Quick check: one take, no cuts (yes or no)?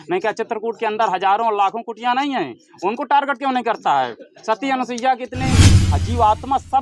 no